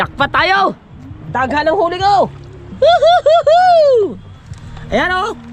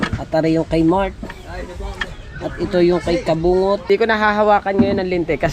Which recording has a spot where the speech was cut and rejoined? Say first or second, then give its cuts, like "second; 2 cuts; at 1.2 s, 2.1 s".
second; 1 cut; at 3.9 s